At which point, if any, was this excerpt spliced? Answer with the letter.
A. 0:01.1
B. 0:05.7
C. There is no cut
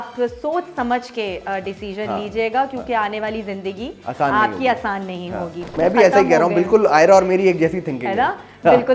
B